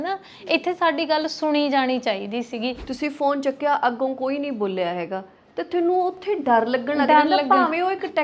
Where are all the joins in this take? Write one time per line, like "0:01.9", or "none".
0:02.9